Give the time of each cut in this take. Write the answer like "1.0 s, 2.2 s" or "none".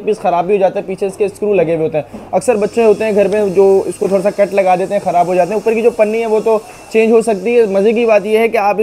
none